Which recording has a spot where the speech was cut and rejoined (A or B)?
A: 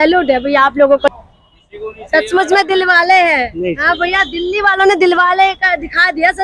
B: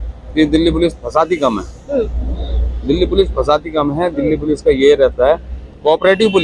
A